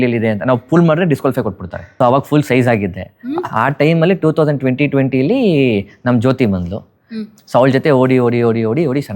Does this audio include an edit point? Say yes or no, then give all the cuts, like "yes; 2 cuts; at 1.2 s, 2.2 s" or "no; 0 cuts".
yes; 1 cut; at 2.0 s